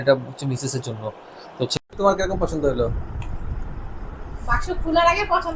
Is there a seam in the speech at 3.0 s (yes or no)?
no